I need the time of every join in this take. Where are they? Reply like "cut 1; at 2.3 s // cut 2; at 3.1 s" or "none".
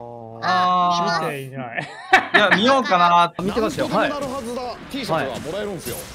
cut 1; at 3.4 s